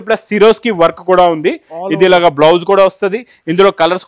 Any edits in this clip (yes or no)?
no